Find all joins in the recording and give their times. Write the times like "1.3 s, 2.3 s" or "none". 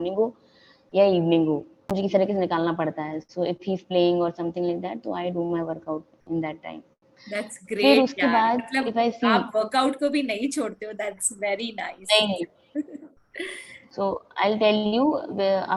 none